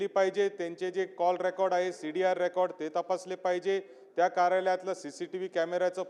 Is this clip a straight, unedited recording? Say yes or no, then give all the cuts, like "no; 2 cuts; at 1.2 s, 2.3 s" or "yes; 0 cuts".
yes; 0 cuts